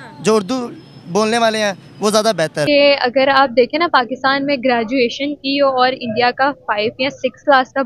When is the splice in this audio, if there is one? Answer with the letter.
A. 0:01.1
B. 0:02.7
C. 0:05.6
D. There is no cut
B